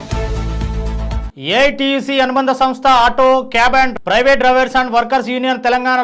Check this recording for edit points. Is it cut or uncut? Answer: cut